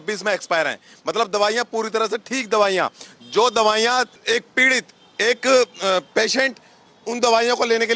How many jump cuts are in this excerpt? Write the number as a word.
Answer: one